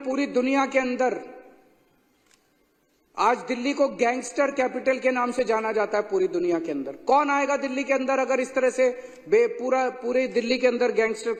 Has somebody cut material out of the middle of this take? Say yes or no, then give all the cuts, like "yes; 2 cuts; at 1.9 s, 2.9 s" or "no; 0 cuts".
no; 0 cuts